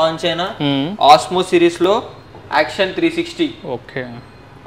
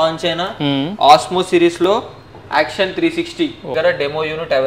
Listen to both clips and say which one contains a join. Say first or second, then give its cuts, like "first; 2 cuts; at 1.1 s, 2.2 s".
second; 1 cut; at 3.7 s